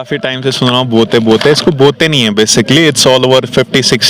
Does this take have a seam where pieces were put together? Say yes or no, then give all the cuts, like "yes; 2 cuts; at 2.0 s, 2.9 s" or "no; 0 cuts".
no; 0 cuts